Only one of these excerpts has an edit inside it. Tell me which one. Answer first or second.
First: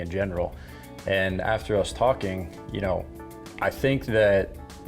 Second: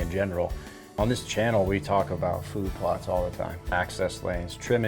second